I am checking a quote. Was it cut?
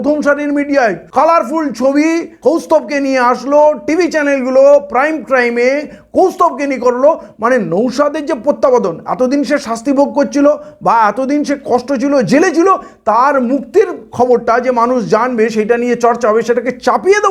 yes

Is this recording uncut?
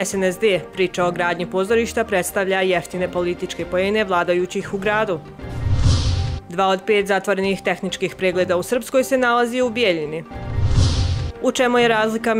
yes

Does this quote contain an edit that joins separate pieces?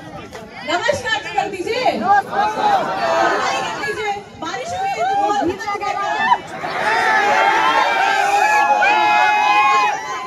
no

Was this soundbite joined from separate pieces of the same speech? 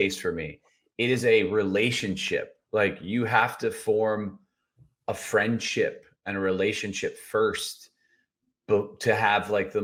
no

